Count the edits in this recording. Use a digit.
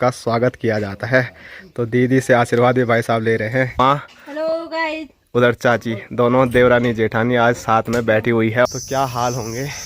2